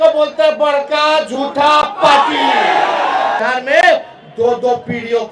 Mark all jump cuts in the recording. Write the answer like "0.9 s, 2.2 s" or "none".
3.4 s